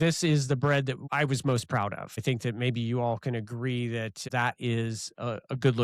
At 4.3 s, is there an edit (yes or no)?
yes